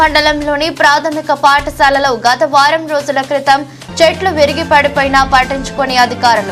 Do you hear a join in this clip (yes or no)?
no